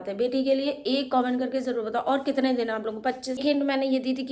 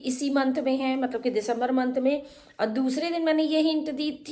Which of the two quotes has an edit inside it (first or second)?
first